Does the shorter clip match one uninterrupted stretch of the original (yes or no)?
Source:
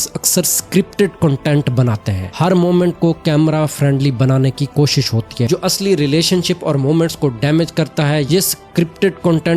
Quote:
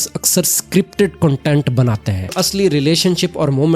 no